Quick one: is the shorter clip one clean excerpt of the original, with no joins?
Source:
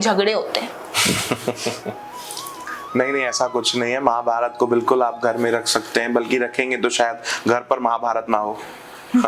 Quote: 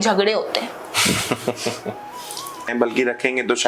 no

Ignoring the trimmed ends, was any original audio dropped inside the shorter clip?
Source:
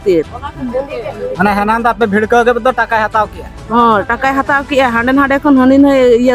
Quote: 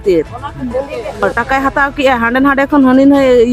yes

